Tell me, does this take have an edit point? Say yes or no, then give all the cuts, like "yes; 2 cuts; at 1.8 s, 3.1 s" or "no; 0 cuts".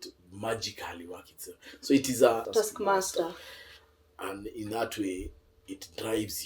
yes; 1 cut; at 2.5 s